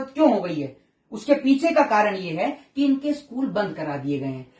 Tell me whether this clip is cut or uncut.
uncut